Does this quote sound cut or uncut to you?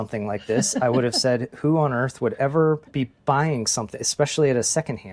cut